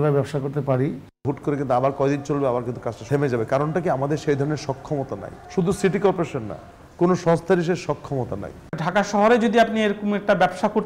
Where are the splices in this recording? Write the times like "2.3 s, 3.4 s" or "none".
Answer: 1.1 s, 3.0 s, 5.3 s, 8.6 s